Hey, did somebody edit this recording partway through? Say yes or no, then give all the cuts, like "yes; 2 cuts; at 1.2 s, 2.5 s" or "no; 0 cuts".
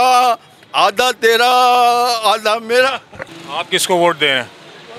yes; 1 cut; at 3.1 s